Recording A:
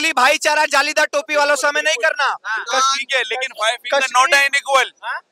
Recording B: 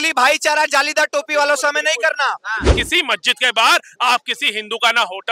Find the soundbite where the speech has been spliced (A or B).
B